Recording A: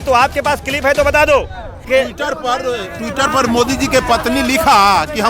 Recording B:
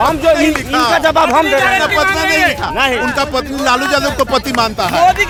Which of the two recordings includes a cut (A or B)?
A